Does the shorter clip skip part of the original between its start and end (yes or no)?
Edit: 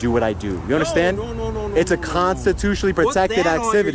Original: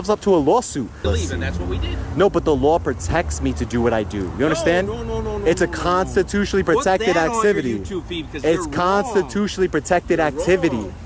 no